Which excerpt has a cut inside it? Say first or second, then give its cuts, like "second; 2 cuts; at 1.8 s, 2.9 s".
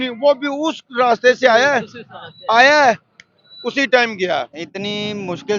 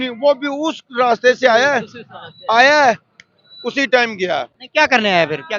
first; 1 cut; at 4.6 s